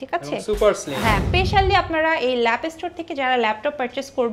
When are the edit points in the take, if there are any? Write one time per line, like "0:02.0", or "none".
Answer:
0:01.3